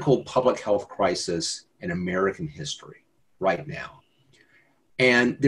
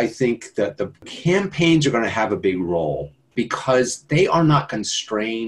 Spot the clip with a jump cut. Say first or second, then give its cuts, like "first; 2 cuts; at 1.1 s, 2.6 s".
second; 2 cuts; at 1.1 s, 3.3 s